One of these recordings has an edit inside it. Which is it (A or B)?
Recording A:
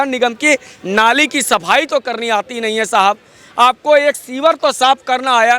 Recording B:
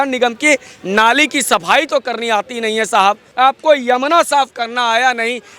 B